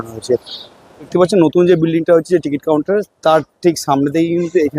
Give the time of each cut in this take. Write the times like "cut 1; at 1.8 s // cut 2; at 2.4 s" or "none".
cut 1; at 1.0 s